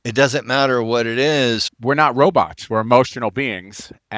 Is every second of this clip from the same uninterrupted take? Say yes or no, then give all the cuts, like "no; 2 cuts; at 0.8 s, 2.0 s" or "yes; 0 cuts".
no; 1 cut; at 1.7 s